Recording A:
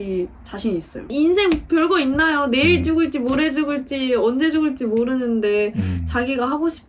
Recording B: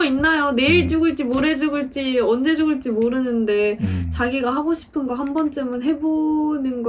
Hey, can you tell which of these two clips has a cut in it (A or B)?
A